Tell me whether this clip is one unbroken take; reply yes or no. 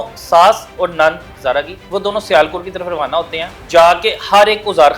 no